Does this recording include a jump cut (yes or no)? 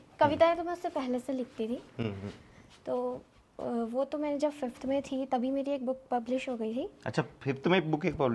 no